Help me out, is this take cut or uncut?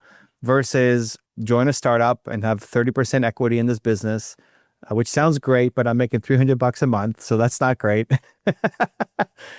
cut